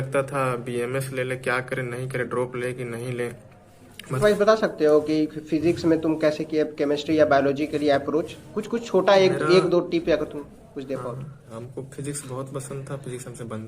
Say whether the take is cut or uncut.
cut